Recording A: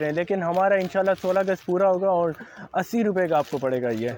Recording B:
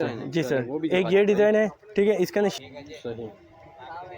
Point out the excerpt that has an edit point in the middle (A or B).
B